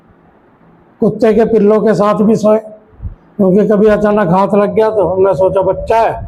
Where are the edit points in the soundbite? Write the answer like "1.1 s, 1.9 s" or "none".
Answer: none